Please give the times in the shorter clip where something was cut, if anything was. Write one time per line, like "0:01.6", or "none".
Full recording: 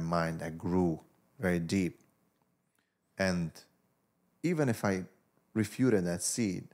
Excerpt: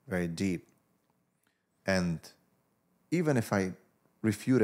none